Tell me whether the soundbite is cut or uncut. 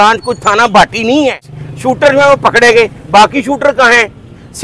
cut